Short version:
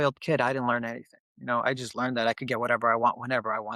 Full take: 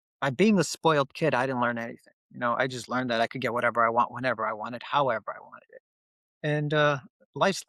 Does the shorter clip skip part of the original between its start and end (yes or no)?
no